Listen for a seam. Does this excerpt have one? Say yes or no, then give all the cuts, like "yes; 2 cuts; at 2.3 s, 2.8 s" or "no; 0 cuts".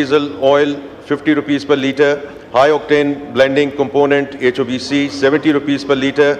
no; 0 cuts